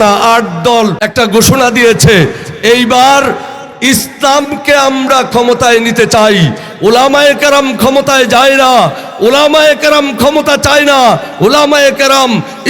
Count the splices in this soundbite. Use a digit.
1